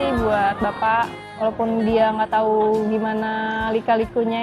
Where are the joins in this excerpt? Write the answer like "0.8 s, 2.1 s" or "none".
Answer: 1.2 s